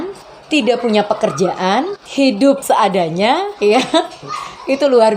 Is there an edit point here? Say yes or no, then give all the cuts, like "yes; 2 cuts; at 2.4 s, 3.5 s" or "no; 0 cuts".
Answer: yes; 2 cuts; at 2.6 s, 3.5 s